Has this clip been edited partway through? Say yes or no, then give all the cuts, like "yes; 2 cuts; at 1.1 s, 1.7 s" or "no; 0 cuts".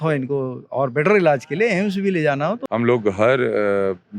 yes; 1 cut; at 2.6 s